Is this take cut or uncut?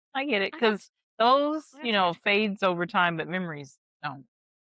uncut